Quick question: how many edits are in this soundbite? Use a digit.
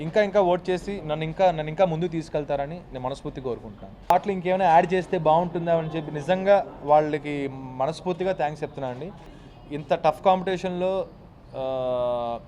2